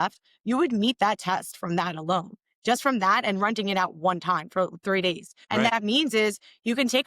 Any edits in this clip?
yes; 1 cut; at 5.5 s

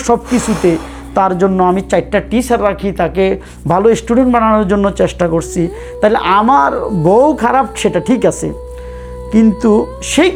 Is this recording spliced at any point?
no; 0 cuts

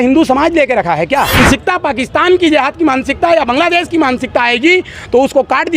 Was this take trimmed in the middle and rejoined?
yes; 1 cut; at 1.4 s

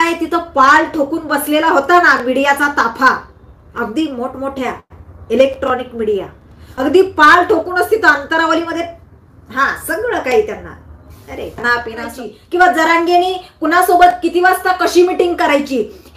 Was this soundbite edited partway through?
yes; 1 cut; at 12.2 s

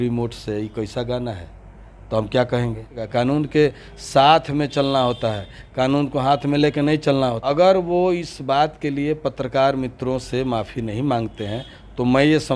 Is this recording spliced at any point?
yes; 2 cuts; at 3.0 s, 7.4 s

